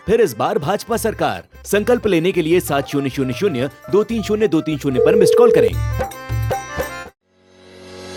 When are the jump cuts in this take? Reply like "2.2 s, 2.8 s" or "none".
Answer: none